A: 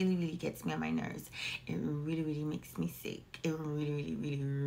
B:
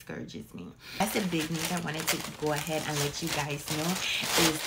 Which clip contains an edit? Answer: B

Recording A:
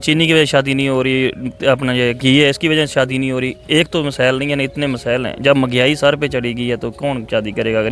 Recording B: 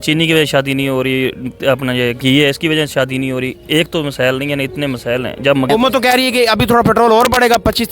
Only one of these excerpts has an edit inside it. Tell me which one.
B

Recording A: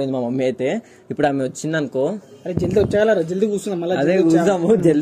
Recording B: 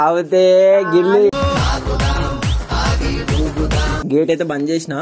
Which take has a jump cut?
B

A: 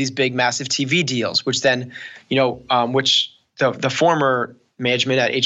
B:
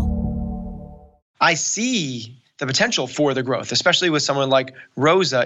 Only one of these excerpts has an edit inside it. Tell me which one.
B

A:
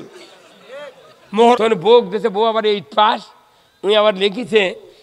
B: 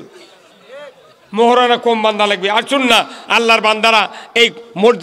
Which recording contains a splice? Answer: A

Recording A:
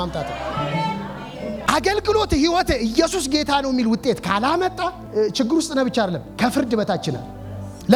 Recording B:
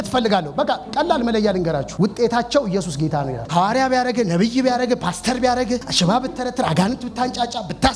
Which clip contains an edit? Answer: B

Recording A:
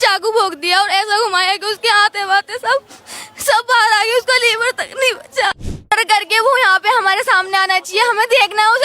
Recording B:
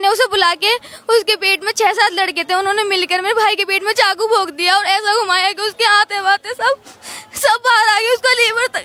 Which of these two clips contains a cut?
A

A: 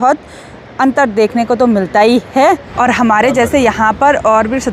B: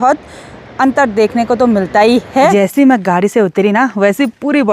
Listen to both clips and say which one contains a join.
B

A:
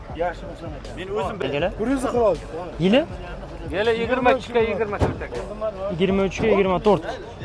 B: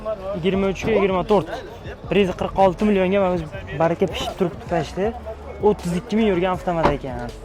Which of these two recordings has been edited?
A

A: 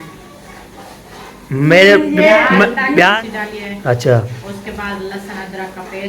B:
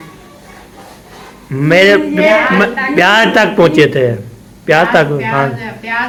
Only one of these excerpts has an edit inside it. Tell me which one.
A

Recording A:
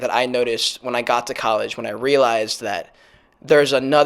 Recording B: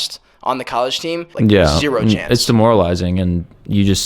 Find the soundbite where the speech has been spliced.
B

